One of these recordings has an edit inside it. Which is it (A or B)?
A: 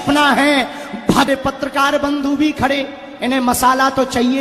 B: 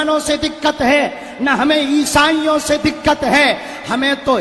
A